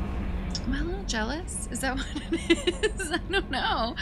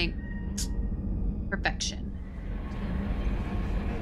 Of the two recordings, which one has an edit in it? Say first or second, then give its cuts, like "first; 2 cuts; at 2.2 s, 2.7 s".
second; 1 cut; at 2.5 s